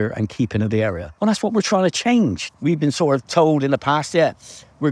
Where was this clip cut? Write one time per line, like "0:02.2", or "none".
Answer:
0:01.1
0:02.5